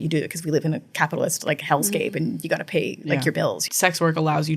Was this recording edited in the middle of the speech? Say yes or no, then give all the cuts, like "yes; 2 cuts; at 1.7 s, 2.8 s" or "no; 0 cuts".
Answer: yes; 1 cut; at 3.6 s